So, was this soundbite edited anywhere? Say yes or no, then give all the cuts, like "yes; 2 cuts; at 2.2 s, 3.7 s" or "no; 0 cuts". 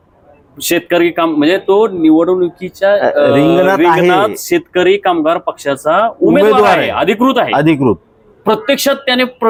no; 0 cuts